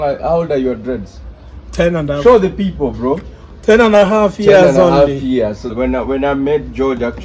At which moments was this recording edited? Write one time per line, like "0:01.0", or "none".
0:05.6